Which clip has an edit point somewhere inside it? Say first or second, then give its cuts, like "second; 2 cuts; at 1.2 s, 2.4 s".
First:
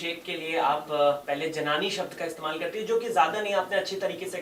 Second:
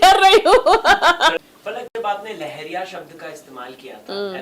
second; 1 cut; at 1.4 s